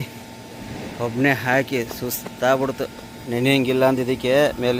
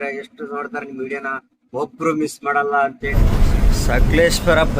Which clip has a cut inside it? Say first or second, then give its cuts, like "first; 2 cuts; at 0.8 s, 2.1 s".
second; 1 cut; at 3.1 s